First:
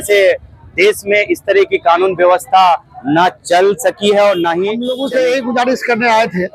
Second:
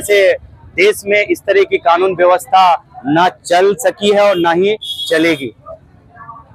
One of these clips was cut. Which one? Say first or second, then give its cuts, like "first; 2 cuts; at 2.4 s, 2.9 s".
first; 1 cut; at 4.9 s